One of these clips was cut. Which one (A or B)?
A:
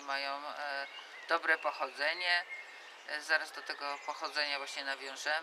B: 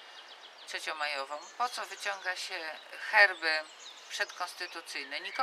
A